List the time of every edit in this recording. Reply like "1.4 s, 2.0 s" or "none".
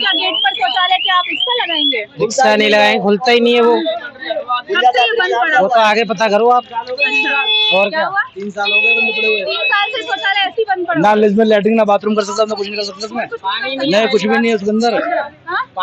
none